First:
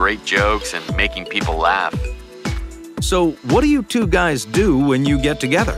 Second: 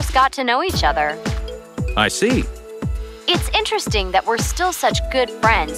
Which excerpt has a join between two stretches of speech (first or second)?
first